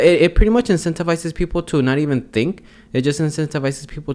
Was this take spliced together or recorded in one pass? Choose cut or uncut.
uncut